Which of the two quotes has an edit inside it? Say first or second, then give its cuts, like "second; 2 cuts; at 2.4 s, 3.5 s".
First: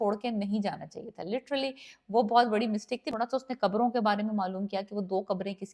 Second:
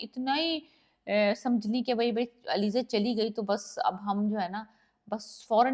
first; 1 cut; at 3.1 s